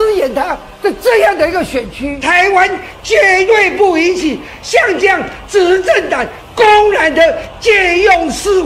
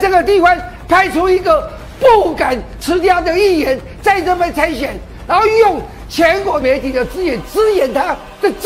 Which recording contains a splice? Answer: first; 1 cut; at 2.2 s

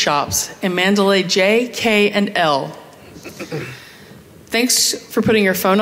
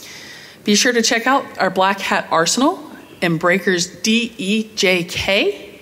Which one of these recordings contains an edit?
first; 1 cut; at 2.8 s

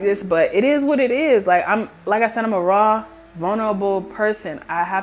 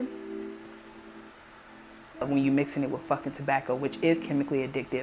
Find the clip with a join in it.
second; 1 cut; at 2.3 s

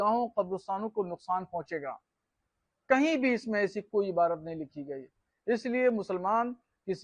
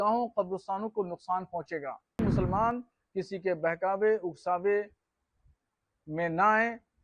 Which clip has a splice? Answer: second; 1 cut; at 2.2 s

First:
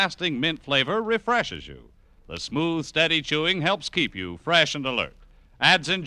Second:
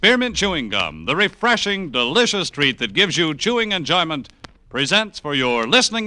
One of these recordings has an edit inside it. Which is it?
first; 1 cut; at 2.5 s

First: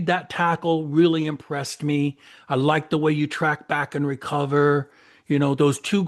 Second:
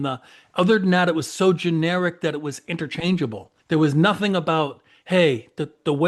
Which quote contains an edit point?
second; 1 cut; at 3.5 s

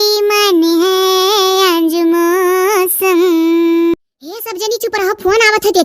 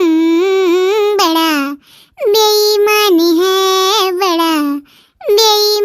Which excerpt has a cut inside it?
first; 1 cut; at 3.9 s

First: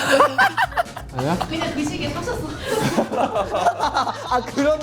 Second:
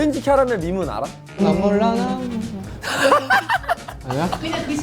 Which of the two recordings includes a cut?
second; 1 cut; at 1.3 s

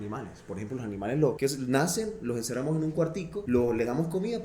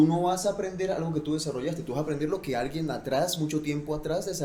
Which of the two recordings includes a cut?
first; 2 cuts; at 1.4 s, 3.4 s

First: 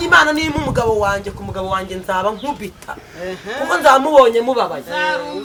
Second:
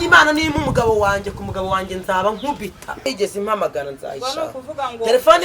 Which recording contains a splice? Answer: second; 1 cut; at 3.1 s

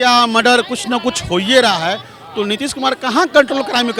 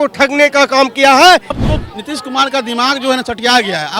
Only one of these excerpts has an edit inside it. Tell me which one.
second; 1 cut; at 1.5 s

